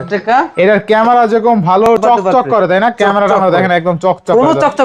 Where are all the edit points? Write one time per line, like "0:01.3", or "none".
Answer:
0:01.9